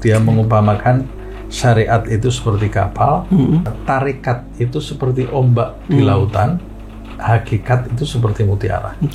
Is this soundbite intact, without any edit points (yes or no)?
yes